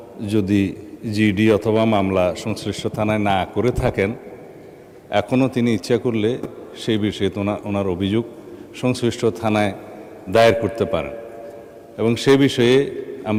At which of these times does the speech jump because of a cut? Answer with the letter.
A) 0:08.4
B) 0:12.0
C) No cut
C